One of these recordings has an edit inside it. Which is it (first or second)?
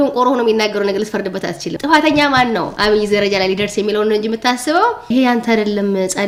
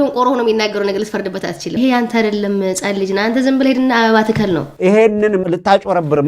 second